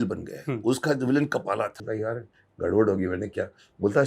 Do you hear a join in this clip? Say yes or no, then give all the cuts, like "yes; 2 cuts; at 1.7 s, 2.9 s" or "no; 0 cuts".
yes; 1 cut; at 1.8 s